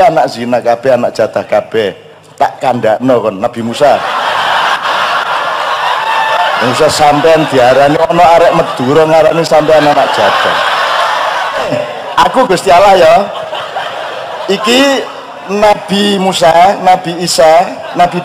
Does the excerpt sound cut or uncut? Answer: cut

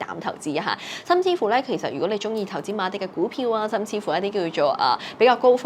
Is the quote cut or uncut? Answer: uncut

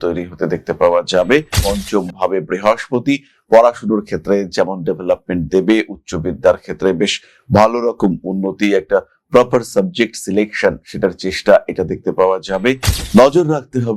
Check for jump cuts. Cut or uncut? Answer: cut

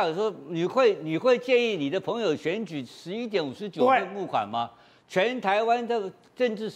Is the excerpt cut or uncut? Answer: uncut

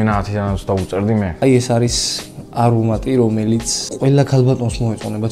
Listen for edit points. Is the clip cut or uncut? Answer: cut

